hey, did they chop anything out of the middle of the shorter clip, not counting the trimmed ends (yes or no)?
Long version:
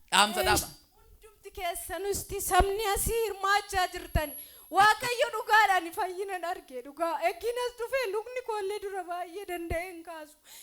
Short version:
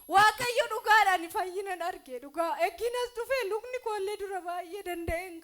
no